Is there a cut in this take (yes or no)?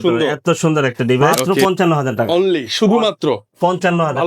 yes